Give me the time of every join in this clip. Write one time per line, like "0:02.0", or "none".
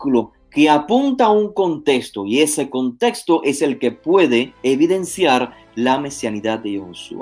0:04.5